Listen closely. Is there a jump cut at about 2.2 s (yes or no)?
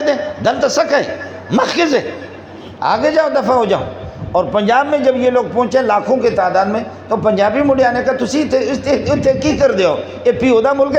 no